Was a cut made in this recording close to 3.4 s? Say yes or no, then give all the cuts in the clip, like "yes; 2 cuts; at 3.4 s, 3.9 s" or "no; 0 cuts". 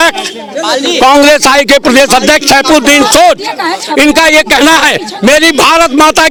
no; 0 cuts